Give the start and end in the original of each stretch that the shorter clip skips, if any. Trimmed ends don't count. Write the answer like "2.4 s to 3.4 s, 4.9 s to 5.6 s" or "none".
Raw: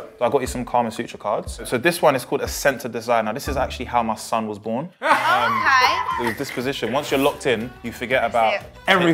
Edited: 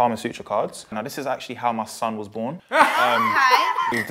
1.7 s to 3.2 s